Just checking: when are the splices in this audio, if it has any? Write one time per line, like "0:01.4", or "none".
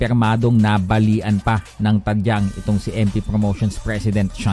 none